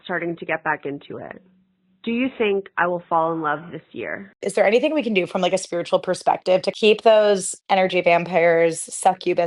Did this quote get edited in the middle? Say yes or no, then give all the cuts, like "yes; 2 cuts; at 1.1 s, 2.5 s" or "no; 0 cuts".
yes; 2 cuts; at 4.4 s, 6.7 s